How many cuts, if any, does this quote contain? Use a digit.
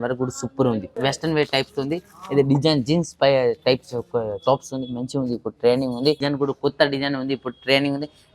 2